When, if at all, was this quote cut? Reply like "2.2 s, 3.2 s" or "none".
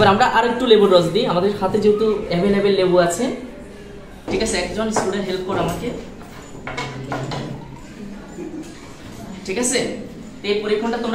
4.2 s